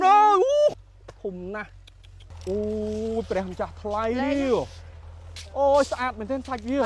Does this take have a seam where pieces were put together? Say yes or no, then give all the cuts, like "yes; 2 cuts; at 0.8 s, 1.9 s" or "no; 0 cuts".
yes; 2 cuts; at 0.7 s, 2.1 s